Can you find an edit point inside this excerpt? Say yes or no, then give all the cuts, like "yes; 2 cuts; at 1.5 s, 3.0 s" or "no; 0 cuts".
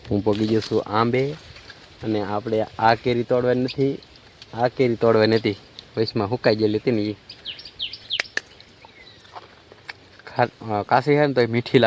no; 0 cuts